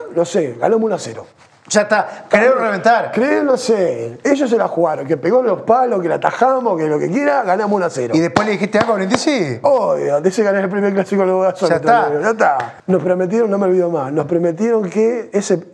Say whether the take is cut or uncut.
cut